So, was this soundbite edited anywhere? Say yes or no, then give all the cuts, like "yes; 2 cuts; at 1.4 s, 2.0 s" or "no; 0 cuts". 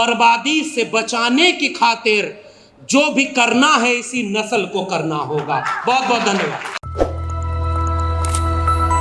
no; 0 cuts